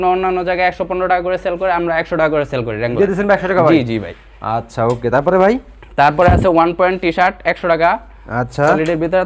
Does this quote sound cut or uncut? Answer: uncut